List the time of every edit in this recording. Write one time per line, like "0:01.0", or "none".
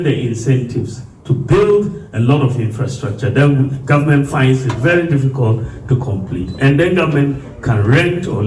none